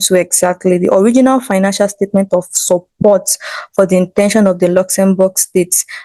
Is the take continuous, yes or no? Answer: yes